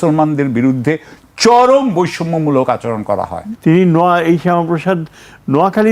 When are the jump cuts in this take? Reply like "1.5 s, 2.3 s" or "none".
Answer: 3.4 s